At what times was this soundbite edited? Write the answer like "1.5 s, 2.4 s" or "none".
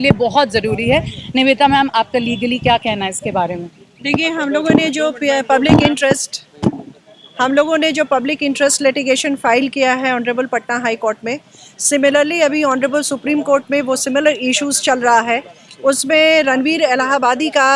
none